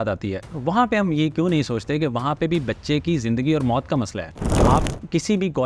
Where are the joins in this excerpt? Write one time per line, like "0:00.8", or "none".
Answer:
0:04.4